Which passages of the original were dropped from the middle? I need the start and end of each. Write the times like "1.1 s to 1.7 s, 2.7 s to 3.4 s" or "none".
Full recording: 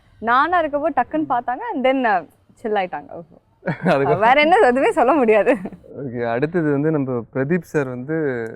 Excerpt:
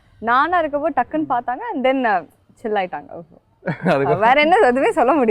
none